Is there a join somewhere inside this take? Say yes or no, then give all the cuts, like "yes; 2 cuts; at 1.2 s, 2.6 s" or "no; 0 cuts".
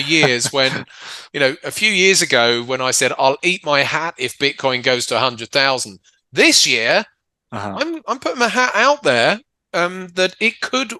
no; 0 cuts